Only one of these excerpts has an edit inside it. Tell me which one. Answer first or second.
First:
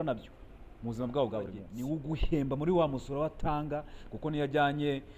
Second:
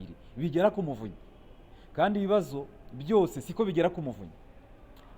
first